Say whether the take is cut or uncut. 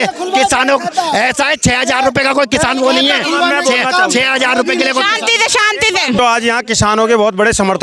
cut